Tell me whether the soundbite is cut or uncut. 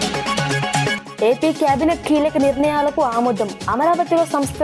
cut